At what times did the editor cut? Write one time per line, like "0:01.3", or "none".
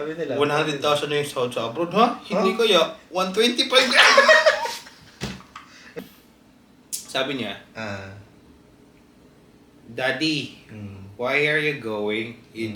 0:06.0